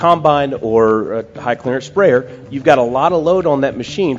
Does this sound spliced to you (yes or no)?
yes